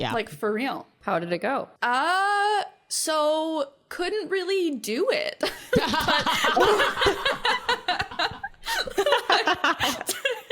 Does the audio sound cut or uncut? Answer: cut